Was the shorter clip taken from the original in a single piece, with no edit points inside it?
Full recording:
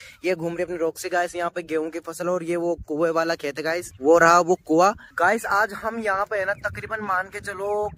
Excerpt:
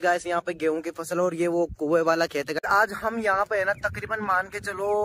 no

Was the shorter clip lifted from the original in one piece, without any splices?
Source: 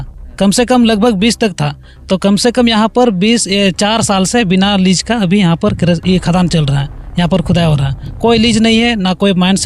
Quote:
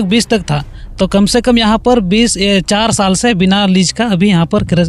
yes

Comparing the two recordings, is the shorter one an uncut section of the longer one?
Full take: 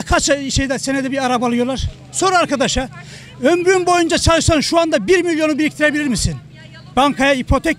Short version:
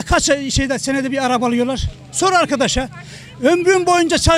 yes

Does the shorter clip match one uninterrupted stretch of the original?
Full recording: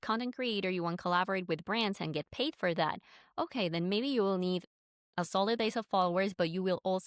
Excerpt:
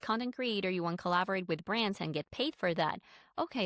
yes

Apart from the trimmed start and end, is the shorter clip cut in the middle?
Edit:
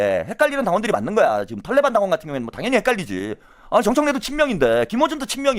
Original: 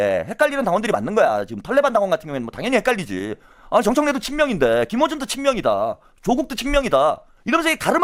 no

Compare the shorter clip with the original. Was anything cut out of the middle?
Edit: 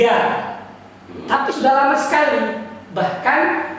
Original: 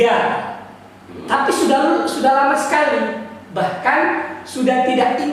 yes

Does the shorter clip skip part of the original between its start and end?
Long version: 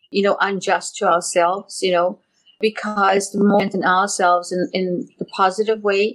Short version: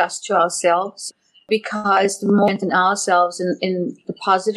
yes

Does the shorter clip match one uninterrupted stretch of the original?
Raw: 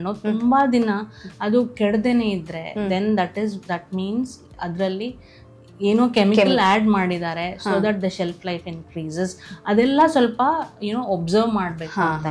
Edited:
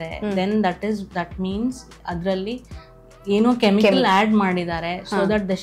yes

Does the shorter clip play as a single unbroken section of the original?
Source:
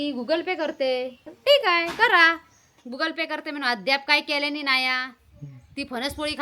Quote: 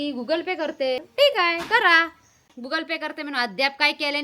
no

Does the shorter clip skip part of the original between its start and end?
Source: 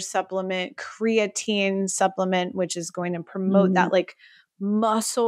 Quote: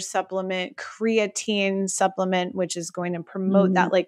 no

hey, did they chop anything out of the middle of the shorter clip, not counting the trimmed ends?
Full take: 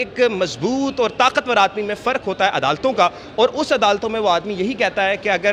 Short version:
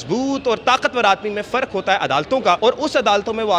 yes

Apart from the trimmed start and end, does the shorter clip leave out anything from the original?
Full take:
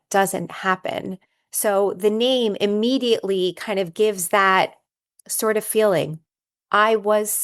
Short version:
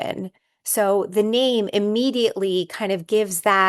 no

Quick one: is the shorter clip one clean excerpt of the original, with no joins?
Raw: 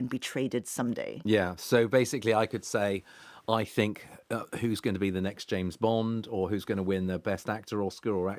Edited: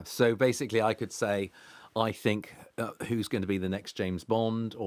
yes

